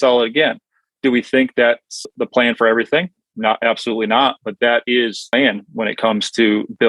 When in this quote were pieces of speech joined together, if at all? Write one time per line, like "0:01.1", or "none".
0:02.1